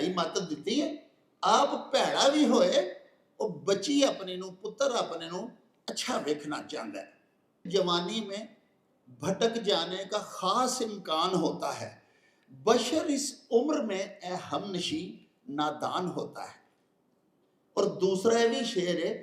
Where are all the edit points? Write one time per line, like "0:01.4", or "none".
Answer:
0:07.7